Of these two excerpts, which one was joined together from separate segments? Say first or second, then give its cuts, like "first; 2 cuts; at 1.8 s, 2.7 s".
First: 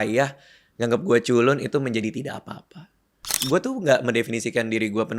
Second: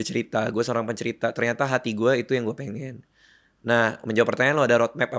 first; 1 cut; at 3.4 s